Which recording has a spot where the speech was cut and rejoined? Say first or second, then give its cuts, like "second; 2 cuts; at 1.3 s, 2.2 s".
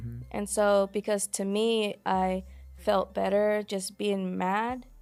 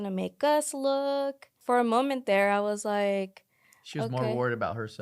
second; 1 cut; at 1.5 s